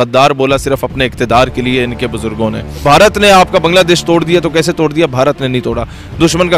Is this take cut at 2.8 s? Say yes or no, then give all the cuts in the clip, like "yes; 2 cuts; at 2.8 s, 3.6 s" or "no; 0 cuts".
yes; 1 cut; at 2.8 s